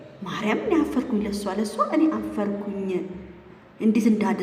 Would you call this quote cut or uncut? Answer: uncut